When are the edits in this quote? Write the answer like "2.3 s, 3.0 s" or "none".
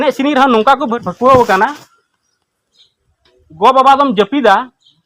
1.0 s

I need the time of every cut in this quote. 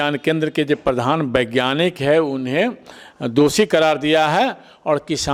none

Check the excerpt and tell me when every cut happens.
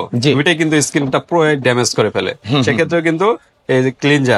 none

